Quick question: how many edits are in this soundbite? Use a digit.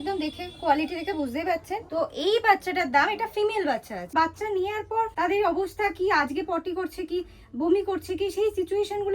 3